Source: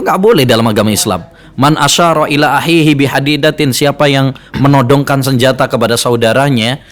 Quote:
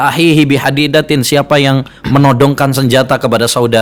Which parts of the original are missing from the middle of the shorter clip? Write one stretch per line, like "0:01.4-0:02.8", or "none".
none